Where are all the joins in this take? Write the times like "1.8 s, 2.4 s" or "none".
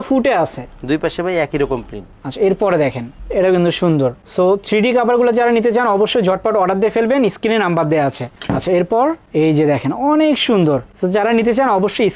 none